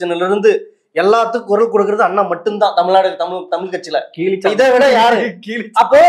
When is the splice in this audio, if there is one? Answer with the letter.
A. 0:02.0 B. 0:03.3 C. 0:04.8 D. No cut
D